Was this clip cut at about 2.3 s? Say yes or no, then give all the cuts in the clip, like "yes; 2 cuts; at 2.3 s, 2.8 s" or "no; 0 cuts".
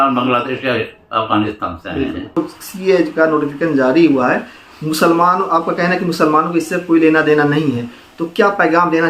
yes; 1 cut; at 2.3 s